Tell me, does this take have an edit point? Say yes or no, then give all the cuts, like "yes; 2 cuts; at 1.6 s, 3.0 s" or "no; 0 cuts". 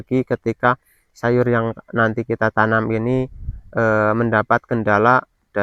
no; 0 cuts